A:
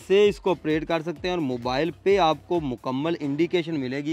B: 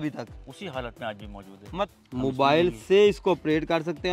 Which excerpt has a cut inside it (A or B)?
B